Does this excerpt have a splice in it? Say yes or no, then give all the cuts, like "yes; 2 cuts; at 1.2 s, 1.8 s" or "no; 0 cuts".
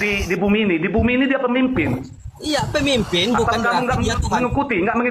no; 0 cuts